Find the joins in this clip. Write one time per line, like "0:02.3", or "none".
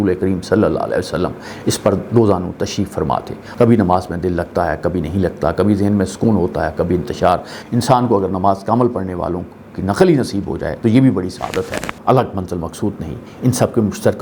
0:03.4
0:07.6
0:11.9